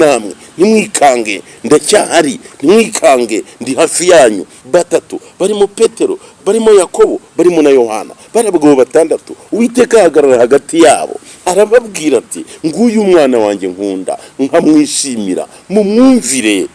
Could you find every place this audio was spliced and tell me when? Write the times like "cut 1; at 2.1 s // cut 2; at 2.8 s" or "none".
cut 1; at 4.5 s